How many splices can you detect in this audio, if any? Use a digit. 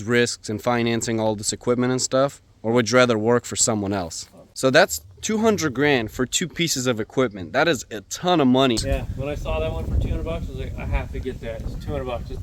2